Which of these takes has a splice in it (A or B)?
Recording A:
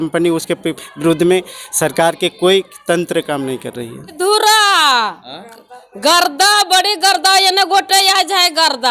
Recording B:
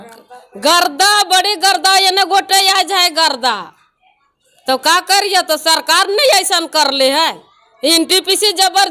A